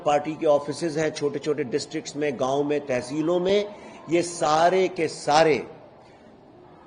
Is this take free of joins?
yes; 0 cuts

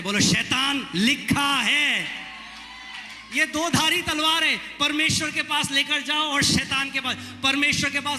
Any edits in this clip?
no; 0 cuts

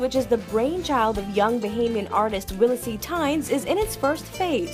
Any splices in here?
no; 0 cuts

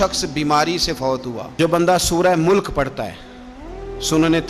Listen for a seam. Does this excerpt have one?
yes; 1 cut; at 1.5 s

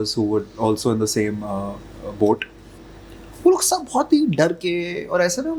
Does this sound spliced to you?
no; 0 cuts

